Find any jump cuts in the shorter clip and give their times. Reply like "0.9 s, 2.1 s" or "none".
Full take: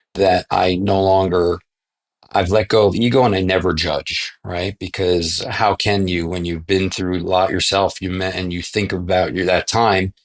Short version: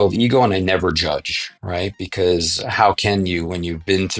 none